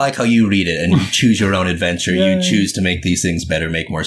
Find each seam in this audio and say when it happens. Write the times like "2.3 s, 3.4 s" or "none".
none